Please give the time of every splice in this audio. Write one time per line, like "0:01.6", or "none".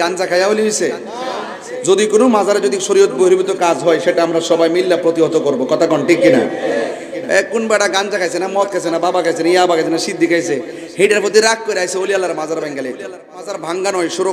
0:13.4

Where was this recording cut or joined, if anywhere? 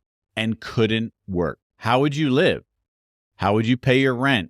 0:01.7

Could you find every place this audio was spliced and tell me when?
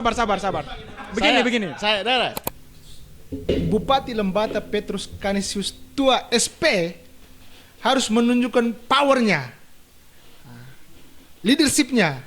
0:02.5

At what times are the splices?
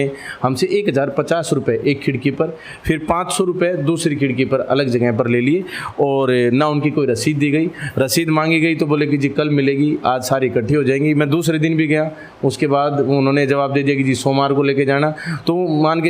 none

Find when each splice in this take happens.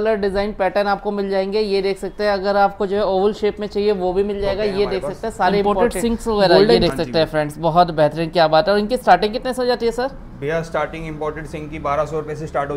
0:05.6

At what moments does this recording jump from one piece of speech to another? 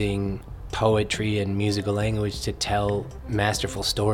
none

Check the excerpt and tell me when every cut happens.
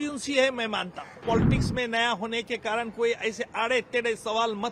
0:01.2

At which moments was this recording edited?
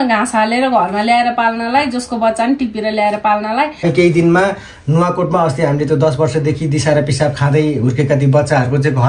0:03.8

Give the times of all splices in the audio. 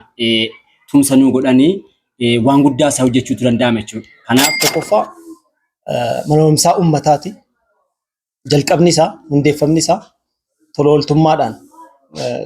0:04.4

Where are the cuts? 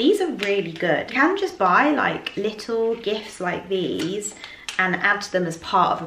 0:01.1

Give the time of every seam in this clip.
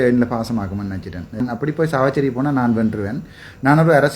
0:01.4

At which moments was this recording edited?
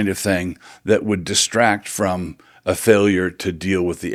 none

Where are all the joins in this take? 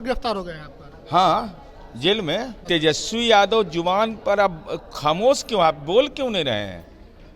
0:02.6

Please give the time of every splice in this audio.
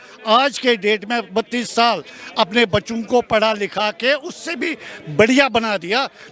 none

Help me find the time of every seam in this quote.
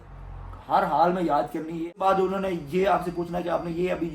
0:01.9

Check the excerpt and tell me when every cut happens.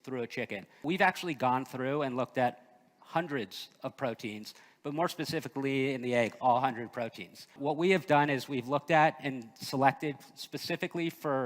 0:00.8
0:07.5

